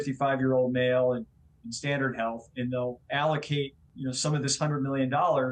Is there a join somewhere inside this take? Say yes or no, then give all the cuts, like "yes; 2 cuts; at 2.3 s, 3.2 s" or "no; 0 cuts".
yes; 1 cut; at 3.8 s